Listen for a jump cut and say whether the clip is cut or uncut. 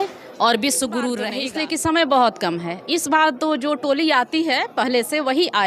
cut